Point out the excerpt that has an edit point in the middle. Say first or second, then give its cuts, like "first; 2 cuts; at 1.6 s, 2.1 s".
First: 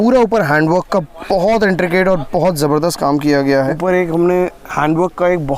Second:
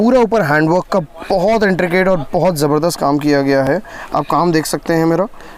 first; 1 cut; at 3.6 s